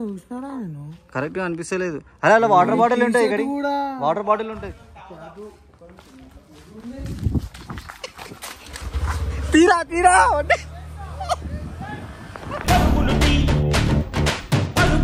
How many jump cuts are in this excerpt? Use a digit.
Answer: 0